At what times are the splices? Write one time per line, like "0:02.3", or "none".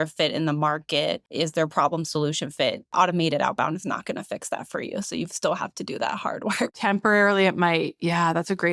0:01.2
0:02.8
0:06.8